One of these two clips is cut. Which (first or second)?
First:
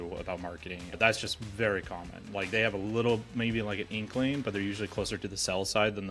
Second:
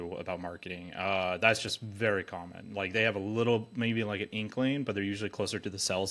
first